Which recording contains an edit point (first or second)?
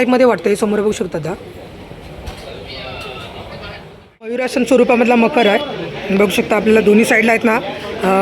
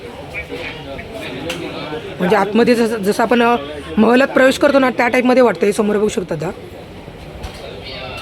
first